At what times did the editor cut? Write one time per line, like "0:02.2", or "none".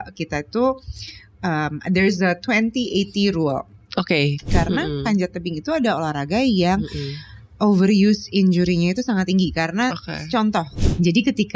0:04.5
0:10.7